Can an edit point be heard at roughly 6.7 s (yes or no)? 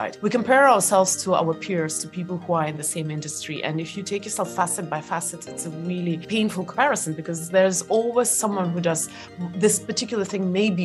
yes